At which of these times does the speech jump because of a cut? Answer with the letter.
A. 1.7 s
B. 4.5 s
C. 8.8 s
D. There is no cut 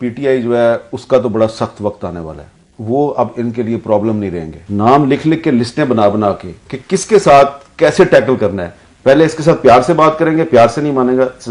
B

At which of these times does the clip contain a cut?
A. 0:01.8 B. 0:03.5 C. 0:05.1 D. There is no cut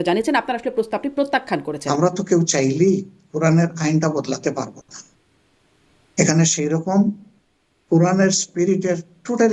A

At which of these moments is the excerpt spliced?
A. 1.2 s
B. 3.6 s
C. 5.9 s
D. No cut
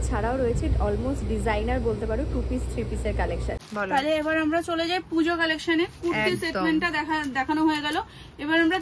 B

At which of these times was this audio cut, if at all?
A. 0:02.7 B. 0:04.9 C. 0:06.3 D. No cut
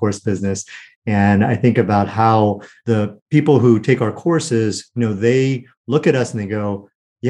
A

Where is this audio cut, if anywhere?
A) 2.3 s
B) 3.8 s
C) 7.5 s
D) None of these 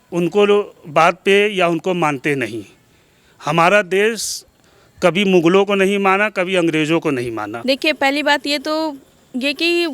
C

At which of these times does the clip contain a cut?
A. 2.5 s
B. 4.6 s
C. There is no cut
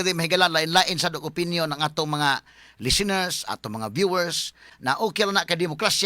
B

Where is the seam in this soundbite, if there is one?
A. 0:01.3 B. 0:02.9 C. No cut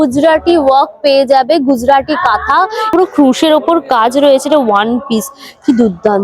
B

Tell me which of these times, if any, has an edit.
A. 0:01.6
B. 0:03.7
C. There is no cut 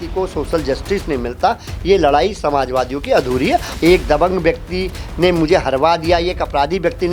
B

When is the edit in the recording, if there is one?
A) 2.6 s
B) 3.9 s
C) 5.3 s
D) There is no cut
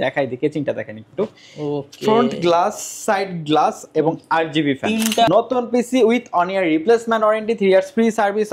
C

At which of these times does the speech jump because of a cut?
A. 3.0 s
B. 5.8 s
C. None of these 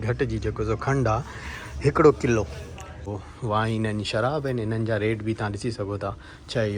A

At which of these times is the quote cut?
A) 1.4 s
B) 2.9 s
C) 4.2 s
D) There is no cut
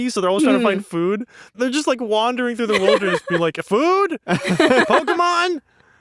A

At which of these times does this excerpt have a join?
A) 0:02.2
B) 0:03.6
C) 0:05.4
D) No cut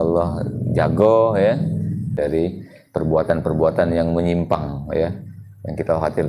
A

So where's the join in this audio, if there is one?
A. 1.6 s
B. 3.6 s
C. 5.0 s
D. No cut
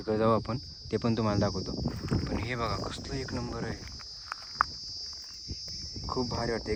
D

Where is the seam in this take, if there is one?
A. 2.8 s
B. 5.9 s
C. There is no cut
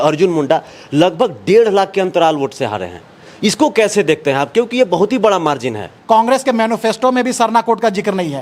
B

